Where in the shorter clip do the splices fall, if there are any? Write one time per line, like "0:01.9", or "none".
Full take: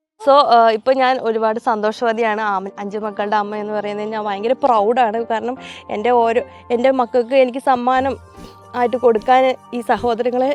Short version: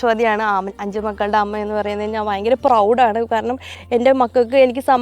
0:03.8